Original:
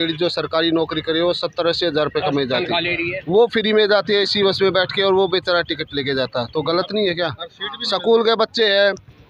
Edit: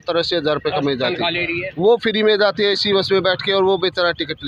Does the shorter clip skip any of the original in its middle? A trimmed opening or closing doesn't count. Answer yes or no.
no